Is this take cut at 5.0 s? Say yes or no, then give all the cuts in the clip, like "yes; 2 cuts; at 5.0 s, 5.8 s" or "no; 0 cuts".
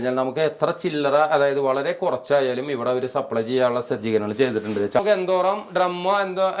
yes; 1 cut; at 5.0 s